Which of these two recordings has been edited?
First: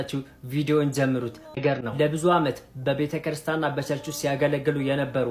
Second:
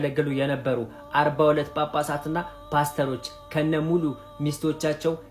first; 1 cut; at 1.6 s

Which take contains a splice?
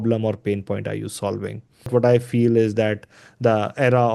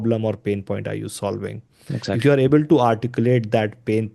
first; 1 cut; at 1.9 s

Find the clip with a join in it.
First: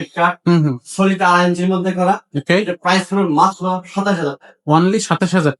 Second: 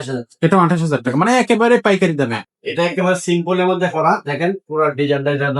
second; 1 cut; at 2.5 s

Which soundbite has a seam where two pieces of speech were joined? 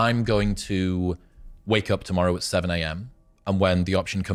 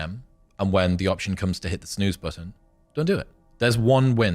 second; 1 cut; at 3.4 s

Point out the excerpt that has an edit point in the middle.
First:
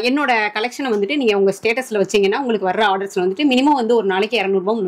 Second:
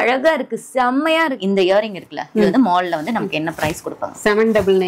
second; 1 cut; at 1.4 s

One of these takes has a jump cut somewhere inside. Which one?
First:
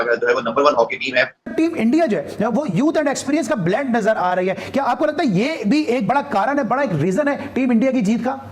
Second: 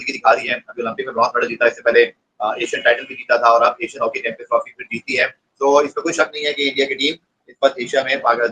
first; 1 cut; at 1.5 s

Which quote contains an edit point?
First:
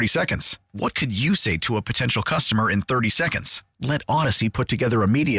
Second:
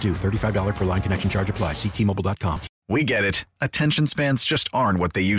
second; 1 cut; at 2.7 s

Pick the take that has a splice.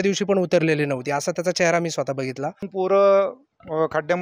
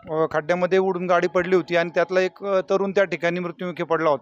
first; 1 cut; at 2.7 s

